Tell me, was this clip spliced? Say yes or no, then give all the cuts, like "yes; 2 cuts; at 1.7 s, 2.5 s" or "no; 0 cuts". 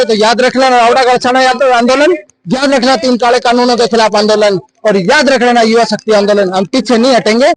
no; 0 cuts